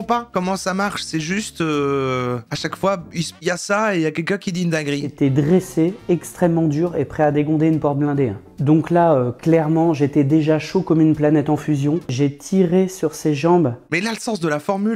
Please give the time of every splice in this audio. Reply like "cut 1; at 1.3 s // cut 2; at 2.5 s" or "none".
cut 1; at 13.9 s